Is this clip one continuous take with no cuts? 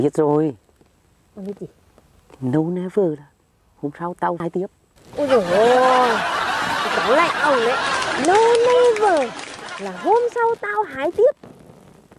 no; 1 cut; at 8.0 s

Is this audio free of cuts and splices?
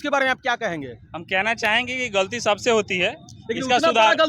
yes; 0 cuts

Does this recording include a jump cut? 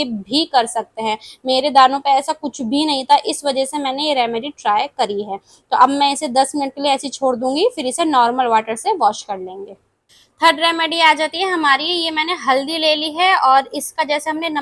no; 0 cuts

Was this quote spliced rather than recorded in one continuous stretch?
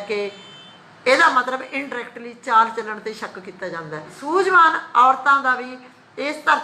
yes; 1 cut; at 4.1 s

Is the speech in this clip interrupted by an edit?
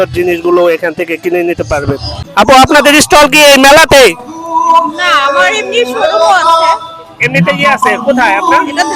yes; 1 cut; at 2.2 s

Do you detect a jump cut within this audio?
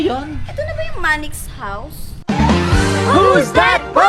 no; 0 cuts

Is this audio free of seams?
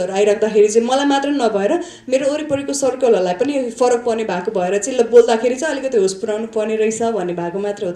yes; 0 cuts

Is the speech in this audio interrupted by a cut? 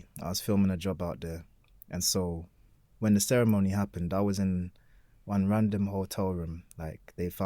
no; 0 cuts

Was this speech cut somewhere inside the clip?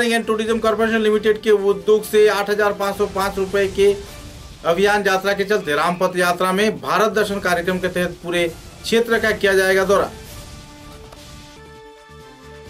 no; 0 cuts

